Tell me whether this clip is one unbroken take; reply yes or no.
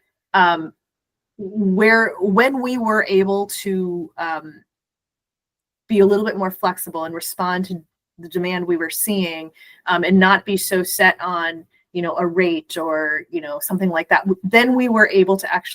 yes